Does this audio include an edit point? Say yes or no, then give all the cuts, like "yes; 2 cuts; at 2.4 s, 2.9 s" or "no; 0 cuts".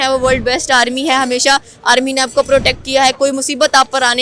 no; 0 cuts